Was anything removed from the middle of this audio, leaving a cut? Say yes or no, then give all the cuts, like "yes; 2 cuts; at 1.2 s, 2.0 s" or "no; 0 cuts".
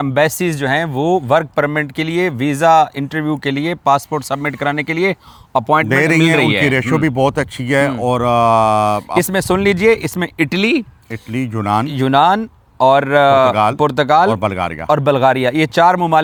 no; 0 cuts